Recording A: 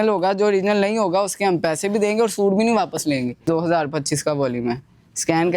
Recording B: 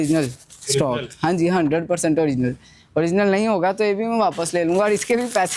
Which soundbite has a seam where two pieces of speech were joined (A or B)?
A